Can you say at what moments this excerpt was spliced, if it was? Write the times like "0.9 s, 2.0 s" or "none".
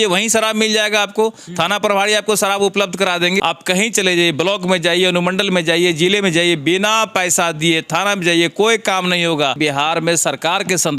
3.4 s, 9.6 s